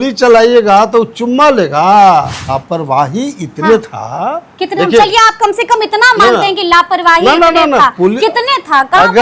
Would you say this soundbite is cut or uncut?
cut